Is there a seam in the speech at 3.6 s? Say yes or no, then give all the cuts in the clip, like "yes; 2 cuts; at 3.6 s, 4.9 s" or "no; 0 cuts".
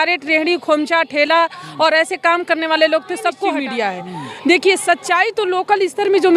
yes; 1 cut; at 3.6 s